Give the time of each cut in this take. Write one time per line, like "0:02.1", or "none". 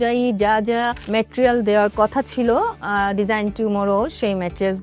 none